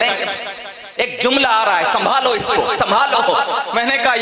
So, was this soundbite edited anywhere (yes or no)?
no